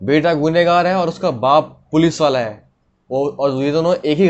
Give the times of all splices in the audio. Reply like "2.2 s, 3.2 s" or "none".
none